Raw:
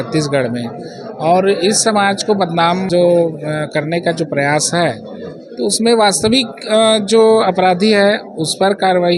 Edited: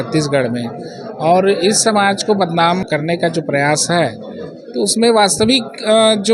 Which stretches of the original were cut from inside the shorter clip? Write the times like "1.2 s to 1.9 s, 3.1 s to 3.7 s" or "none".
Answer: 2.8 s to 3.7 s

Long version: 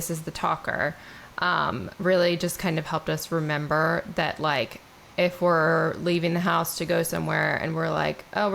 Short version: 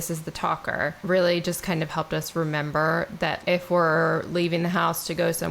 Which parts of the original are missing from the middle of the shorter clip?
1.0 s to 1.9 s, 4.3 s to 5.1 s

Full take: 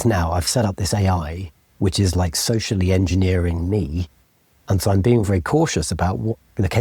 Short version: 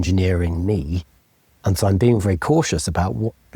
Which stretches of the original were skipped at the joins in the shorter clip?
none

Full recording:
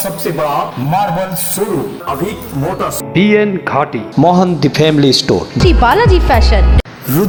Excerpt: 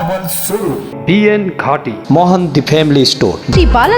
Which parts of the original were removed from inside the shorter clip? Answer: 2.0 s to 3.0 s

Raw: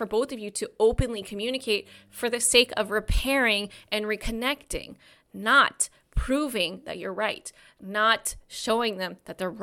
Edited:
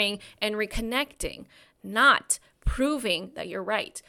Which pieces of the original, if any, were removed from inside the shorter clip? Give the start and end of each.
none

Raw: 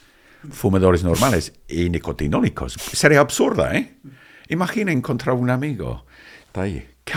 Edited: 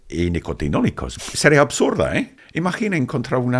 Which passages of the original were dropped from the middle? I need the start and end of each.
4.0 s to 4.4 s

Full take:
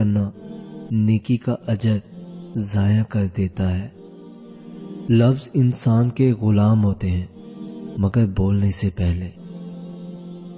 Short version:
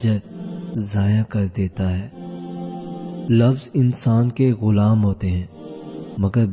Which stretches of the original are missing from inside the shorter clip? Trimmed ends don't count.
none

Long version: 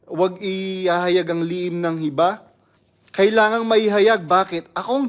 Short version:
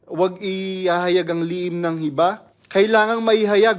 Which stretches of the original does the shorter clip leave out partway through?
2.5 s to 3.0 s

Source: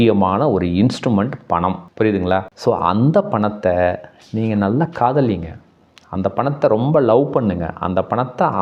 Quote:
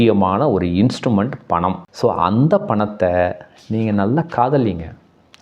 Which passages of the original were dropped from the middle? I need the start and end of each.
1.9 s to 2.5 s

